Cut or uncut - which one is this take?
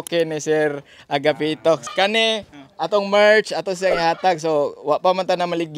cut